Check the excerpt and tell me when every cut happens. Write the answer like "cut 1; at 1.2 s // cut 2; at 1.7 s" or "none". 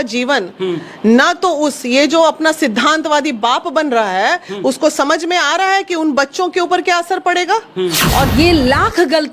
cut 1; at 8.3 s